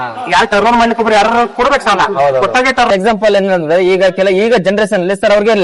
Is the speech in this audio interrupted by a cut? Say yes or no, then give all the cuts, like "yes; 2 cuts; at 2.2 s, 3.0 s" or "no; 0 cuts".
yes; 1 cut; at 2.9 s